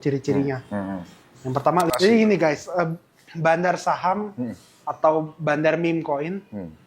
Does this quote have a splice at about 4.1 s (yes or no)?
no